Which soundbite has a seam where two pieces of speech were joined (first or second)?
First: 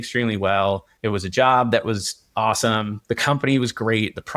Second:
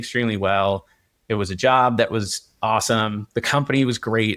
first